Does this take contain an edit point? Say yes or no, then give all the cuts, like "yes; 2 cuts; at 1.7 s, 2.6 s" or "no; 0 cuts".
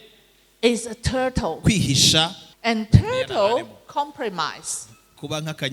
yes; 1 cut; at 2.5 s